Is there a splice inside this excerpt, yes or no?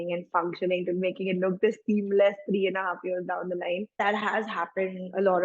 yes